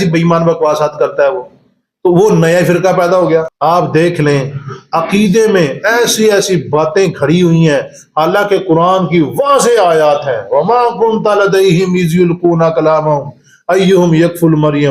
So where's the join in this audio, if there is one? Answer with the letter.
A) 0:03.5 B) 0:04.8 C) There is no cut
A